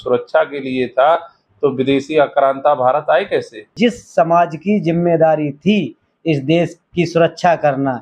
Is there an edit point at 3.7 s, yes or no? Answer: yes